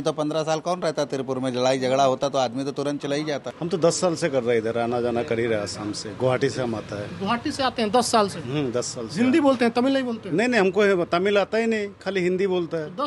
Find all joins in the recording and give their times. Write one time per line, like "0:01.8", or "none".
0:03.5